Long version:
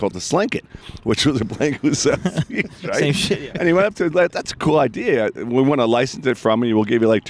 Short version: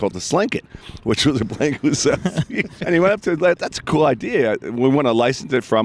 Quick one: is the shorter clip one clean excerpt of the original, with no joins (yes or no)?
no